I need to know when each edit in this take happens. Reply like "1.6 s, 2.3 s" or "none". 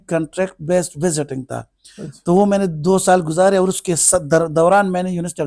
none